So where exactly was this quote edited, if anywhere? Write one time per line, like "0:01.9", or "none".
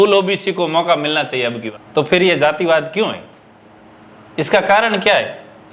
0:01.6